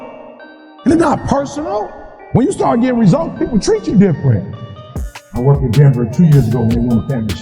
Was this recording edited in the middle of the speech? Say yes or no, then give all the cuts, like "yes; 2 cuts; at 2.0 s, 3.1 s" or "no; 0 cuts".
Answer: yes; 1 cut; at 4.8 s